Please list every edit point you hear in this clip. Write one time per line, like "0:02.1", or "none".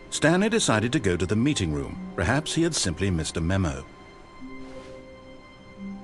0:03.8